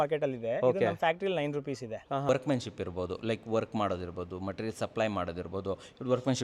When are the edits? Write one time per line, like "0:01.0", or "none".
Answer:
0:02.3